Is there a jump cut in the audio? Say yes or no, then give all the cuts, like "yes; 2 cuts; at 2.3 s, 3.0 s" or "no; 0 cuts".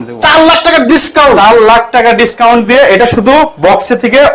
no; 0 cuts